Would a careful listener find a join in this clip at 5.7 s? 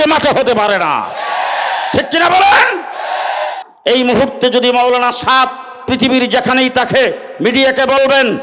no; 1 cut; at 3.7 s

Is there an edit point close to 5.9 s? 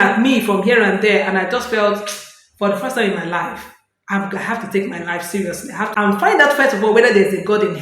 yes; 1 cut; at 5.9 s

